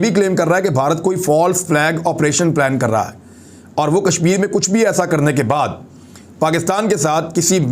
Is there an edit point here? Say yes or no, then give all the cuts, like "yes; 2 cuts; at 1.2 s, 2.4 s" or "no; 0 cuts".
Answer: no; 0 cuts